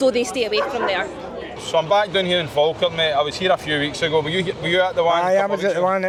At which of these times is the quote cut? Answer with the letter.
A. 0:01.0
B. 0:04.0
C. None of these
C